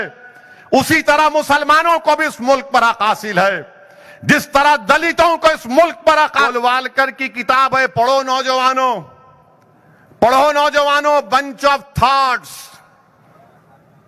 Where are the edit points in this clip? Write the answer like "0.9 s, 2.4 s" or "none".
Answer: 6.5 s